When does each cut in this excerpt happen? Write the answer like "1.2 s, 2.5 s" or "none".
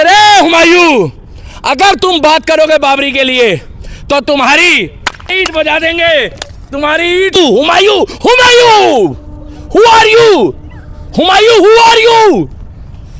5.3 s, 7.3 s